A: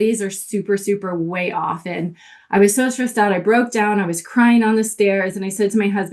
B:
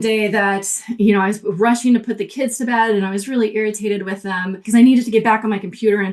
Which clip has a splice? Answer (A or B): B